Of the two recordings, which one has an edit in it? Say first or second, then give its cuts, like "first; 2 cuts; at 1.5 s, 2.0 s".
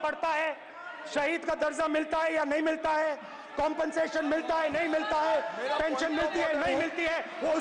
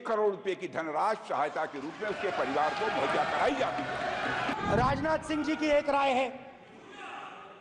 second; 1 cut; at 4.5 s